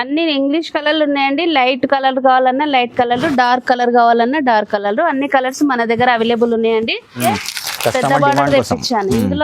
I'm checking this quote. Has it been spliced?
yes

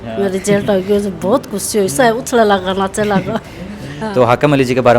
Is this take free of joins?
no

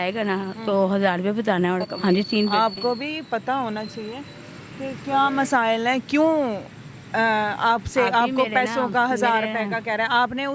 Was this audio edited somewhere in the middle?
yes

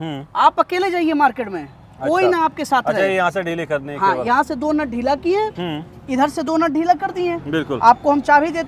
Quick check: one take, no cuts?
yes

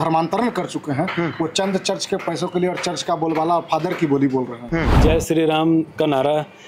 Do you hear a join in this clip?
yes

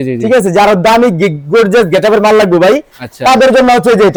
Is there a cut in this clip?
no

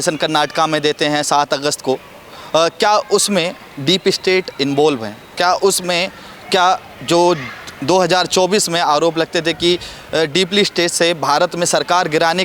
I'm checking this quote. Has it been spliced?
no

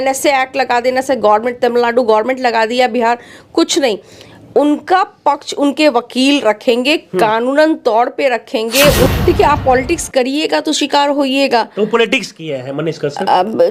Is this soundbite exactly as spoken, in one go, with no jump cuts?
no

